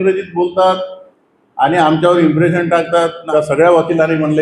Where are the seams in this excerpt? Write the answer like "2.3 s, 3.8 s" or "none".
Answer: 3.2 s